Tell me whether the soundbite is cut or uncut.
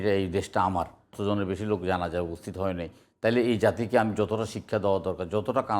cut